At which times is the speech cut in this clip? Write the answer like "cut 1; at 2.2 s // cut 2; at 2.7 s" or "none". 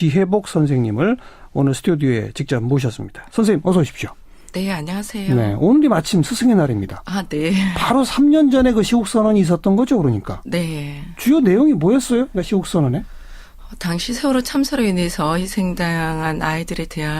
cut 1; at 12.1 s